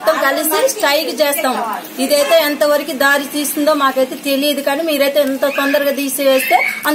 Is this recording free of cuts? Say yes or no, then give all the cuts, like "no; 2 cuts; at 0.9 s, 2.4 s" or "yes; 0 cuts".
yes; 0 cuts